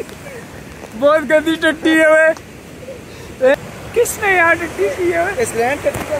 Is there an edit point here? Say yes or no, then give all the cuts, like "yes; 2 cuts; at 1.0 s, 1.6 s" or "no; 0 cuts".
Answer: no; 0 cuts